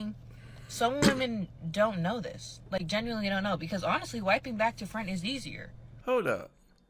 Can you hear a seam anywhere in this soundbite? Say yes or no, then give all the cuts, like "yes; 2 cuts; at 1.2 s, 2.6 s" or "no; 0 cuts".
yes; 1 cut; at 5.9 s